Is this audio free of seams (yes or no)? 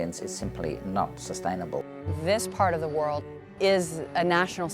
no